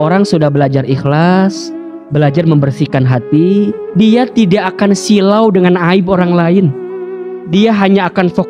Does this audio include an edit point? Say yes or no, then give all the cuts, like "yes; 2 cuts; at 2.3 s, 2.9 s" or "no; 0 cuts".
yes; 1 cut; at 3.8 s